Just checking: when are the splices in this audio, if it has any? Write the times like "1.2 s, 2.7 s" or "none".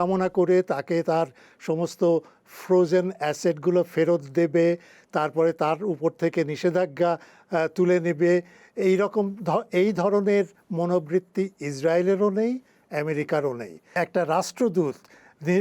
14.0 s